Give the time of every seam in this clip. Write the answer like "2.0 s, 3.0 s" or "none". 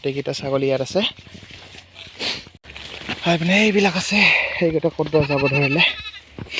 2.5 s